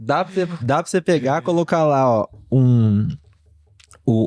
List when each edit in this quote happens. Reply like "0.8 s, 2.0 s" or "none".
none

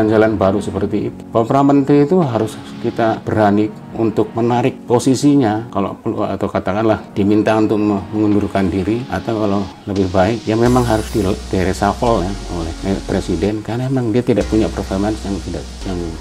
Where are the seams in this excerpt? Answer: 1.2 s, 3.2 s, 4.8 s, 5.7 s, 7.1 s, 9.1 s, 10.4 s, 11.1 s, 12.7 s

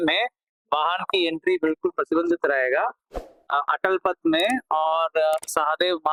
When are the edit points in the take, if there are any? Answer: none

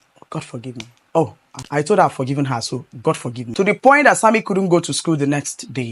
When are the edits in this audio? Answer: 1.5 s, 3.4 s

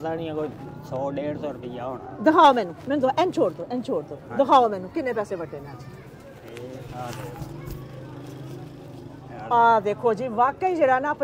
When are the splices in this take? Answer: none

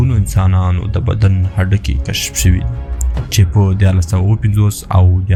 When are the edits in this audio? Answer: none

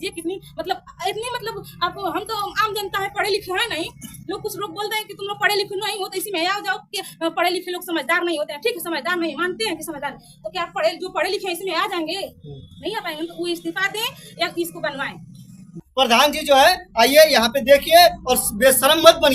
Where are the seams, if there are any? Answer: 15.7 s

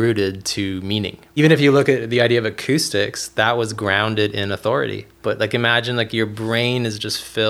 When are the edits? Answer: 1.3 s, 5.1 s

